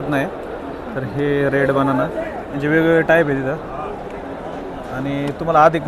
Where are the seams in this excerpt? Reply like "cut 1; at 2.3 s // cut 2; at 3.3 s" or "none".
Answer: none

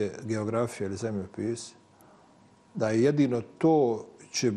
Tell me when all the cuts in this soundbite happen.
none

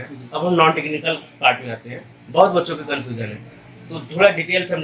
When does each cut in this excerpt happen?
none

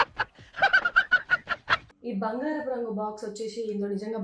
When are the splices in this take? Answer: cut 1; at 1.9 s

